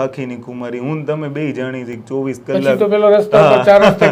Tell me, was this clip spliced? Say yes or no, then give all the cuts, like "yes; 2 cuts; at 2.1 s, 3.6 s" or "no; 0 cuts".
no; 0 cuts